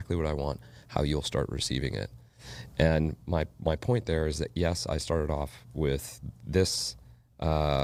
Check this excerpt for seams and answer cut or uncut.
uncut